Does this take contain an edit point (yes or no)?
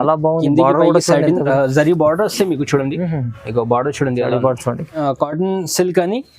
yes